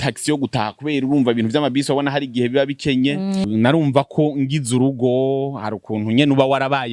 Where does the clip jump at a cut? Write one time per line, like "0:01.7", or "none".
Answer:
0:03.5